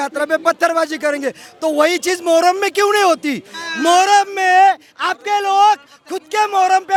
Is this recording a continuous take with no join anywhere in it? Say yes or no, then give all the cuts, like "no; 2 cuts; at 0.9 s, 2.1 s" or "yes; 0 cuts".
yes; 0 cuts